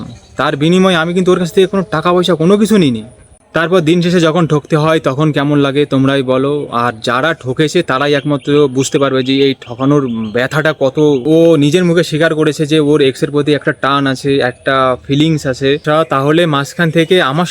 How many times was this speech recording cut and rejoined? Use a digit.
2